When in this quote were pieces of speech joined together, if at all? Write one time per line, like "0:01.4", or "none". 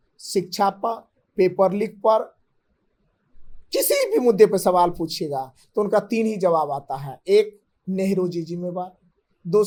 none